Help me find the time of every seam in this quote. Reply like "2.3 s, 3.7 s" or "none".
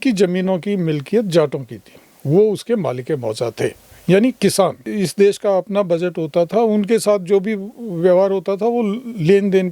4.9 s